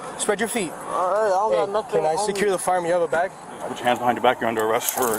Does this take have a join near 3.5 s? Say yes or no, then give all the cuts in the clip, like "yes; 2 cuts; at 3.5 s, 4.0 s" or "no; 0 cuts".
yes; 1 cut; at 3.5 s